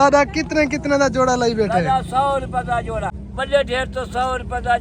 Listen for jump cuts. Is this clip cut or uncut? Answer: cut